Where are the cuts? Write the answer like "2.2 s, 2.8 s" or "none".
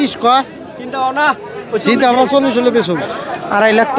3.1 s